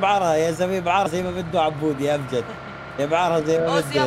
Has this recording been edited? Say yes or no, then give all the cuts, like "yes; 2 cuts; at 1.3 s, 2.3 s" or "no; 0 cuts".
yes; 1 cut; at 1.1 s